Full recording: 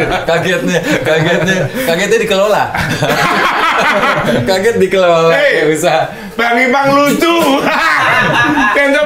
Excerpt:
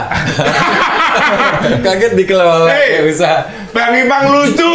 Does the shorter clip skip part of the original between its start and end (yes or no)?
no